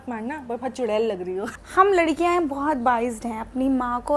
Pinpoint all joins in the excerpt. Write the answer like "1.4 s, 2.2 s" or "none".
1.5 s

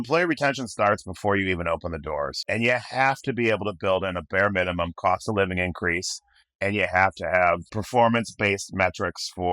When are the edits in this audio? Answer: 2.4 s, 7.7 s

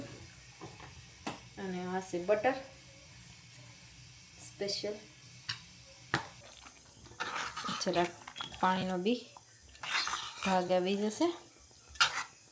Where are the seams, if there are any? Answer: 6.3 s

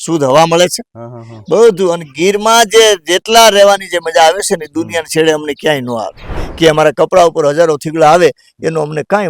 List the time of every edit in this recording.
6.4 s

